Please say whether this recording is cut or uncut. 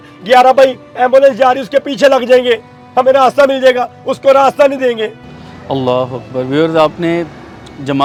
uncut